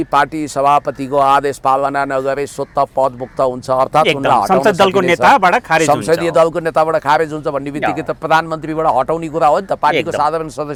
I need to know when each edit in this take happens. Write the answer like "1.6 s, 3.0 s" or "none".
none

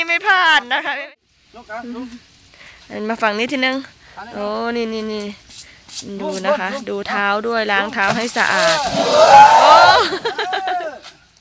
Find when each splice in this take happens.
1.0 s

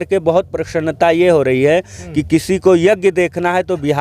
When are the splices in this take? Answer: none

